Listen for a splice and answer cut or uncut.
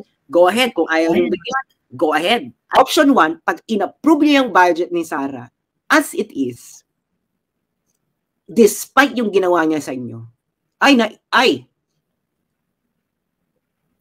cut